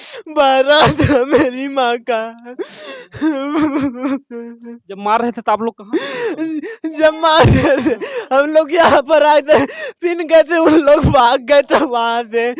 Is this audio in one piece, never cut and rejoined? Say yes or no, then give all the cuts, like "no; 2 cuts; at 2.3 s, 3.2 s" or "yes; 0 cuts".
yes; 0 cuts